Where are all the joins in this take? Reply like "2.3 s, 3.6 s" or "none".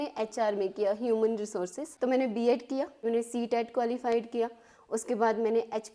1.8 s, 3.0 s